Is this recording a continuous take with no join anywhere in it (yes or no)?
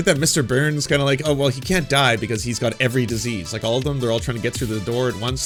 yes